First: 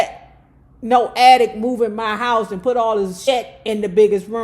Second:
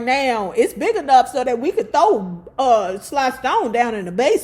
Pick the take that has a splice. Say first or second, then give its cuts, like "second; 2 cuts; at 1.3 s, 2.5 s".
first; 1 cut; at 3.2 s